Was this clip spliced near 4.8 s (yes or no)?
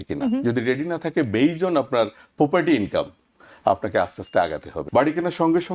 yes